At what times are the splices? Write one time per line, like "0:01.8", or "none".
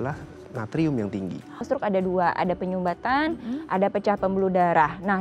0:01.7

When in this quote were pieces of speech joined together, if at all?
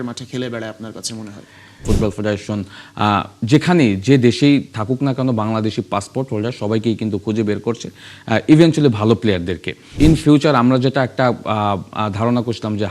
0:01.8
0:09.8

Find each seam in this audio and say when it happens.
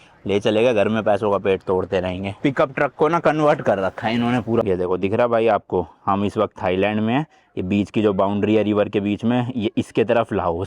0:02.4
0:04.6

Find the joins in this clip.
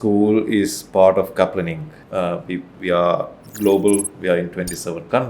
0:02.3

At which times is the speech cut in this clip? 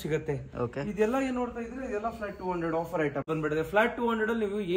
0:03.3

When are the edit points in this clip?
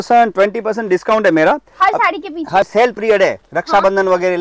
0:02.7

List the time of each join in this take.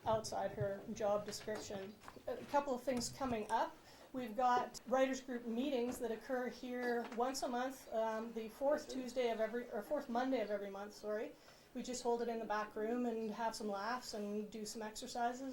0:02.1
0:04.8

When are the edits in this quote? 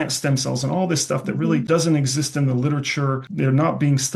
0:01.6
0:03.3

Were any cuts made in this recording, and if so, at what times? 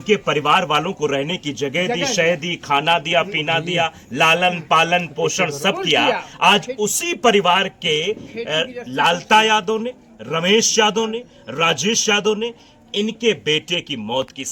none

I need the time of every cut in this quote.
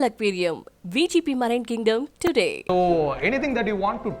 0:02.5

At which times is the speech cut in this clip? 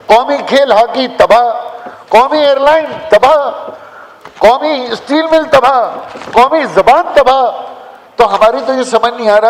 none

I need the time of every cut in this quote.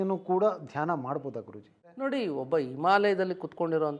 0:01.9

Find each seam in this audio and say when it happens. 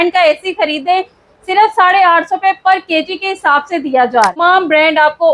0:04.3

